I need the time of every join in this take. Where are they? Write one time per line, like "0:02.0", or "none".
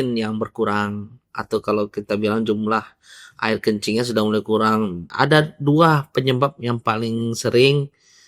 0:05.1